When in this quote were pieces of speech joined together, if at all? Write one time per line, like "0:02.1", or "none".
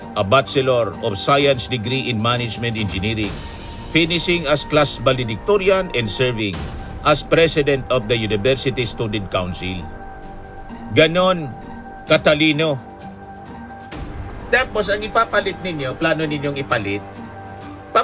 none